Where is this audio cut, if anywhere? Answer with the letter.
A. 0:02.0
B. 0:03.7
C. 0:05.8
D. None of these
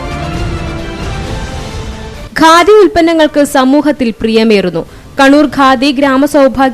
A